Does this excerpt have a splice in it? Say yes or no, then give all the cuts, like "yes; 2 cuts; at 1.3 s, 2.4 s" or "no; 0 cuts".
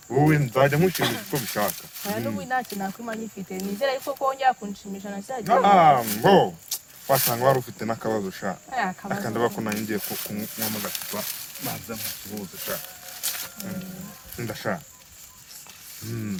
no; 0 cuts